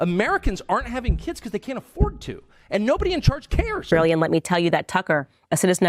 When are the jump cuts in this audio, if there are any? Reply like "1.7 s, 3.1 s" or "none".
3.8 s